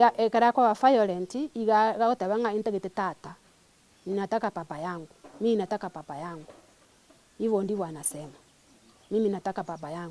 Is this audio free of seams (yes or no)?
yes